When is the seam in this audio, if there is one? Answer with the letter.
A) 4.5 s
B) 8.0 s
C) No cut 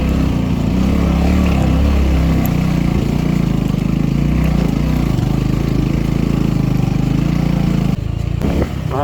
B